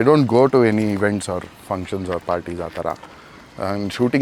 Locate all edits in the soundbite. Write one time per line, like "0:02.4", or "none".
none